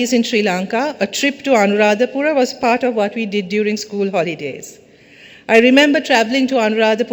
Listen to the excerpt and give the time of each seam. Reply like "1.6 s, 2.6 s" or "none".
none